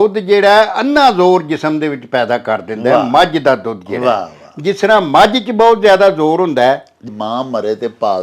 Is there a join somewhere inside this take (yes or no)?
yes